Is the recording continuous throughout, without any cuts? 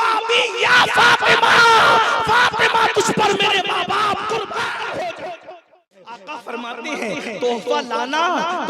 no; 1 cut; at 6.3 s

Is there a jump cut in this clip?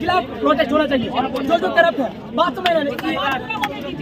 no; 0 cuts

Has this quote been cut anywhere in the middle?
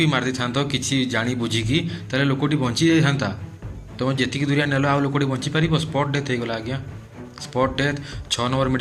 no; 0 cuts

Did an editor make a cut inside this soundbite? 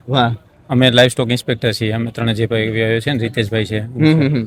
no; 0 cuts

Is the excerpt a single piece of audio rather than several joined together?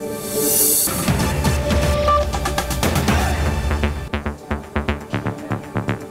no; 2 cuts; at 0.9 s, 4.0 s

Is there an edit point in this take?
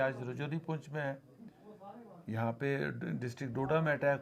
no; 0 cuts

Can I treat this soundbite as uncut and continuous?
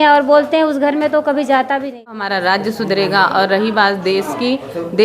no; 1 cut; at 2.3 s

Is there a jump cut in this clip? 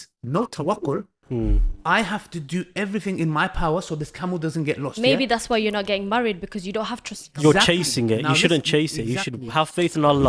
no; 0 cuts

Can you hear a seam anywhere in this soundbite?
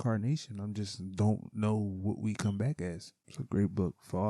yes; 1 cut; at 3.1 s

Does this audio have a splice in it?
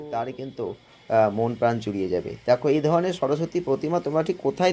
no; 0 cuts

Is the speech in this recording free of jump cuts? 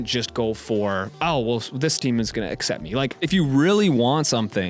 no; 1 cut; at 3.2 s

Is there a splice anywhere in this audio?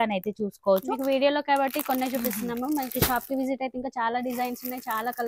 no; 0 cuts

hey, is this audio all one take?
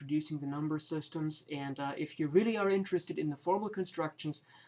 no; 1 cut; at 3.5 s

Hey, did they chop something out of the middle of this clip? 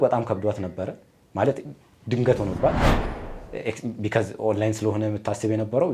no; 0 cuts

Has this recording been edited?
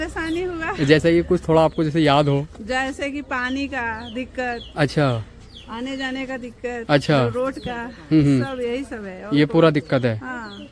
no; 0 cuts

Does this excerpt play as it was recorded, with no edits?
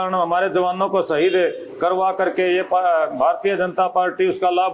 yes; 0 cuts

